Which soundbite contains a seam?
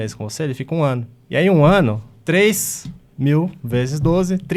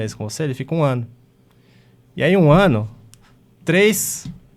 first; 2 cuts; at 1.1 s, 2.1 s

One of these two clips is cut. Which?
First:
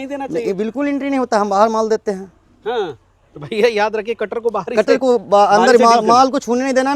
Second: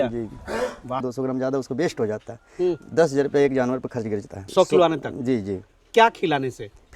second; 1 cut; at 1.1 s

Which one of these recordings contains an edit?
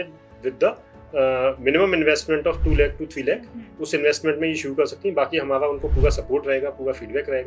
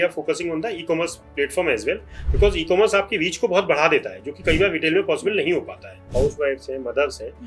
second; 1 cut; at 6.1 s

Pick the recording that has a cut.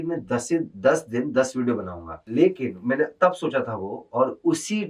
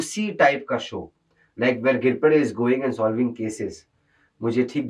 first; 1 cut; at 2.2 s

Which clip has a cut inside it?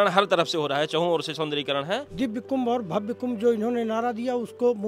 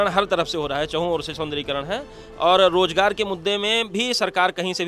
first; 1 cut; at 2.1 s

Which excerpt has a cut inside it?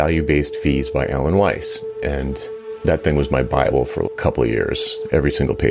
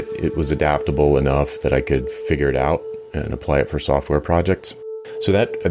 first; 1 cut; at 2.4 s

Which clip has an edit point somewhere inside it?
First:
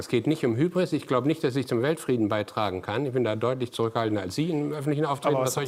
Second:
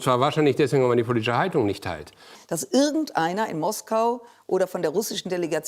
second; 1 cut; at 2.4 s

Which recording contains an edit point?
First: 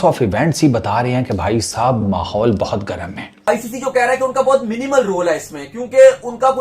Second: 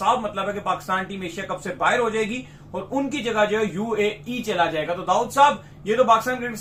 first; 1 cut; at 3.5 s

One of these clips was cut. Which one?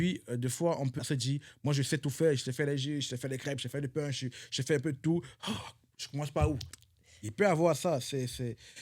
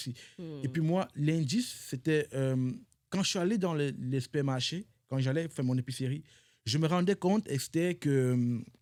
first; 1 cut; at 1.0 s

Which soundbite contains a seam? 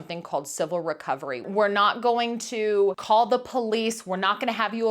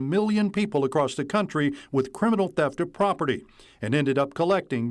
first; 2 cuts; at 1.5 s, 3.0 s

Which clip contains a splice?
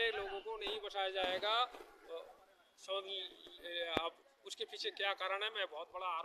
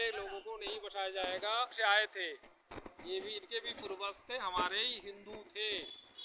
second; 1 cut; at 1.8 s

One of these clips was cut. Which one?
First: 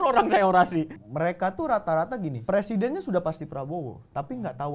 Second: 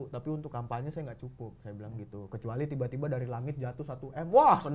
first; 2 cuts; at 1.0 s, 2.4 s

